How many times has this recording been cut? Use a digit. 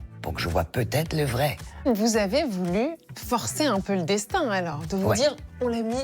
1